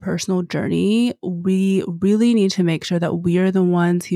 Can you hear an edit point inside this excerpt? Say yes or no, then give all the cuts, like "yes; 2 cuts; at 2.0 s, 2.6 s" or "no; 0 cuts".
no; 0 cuts